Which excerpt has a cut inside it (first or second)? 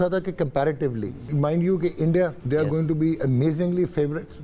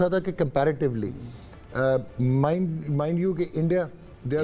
first